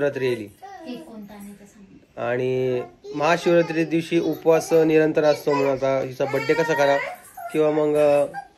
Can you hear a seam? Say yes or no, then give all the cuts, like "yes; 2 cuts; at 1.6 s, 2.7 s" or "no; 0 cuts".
no; 0 cuts